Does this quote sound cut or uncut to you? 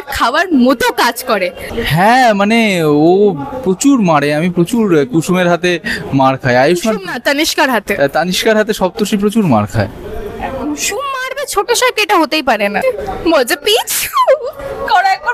cut